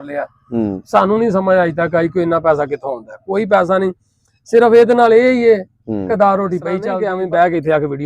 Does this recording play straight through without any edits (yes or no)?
no